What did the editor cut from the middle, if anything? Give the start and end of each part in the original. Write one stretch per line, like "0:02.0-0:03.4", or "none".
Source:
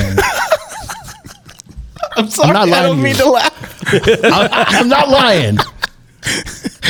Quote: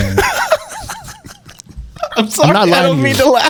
none